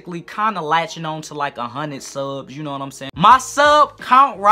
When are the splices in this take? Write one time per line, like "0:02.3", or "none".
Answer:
0:03.0